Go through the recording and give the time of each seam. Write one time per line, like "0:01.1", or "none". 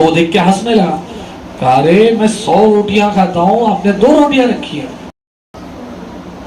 0:05.3